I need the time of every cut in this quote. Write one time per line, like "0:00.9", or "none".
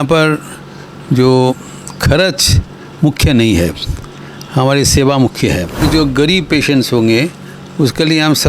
0:05.8